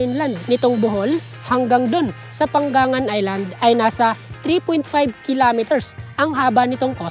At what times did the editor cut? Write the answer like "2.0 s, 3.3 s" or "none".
none